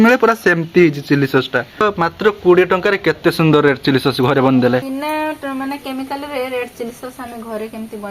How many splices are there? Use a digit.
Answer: 2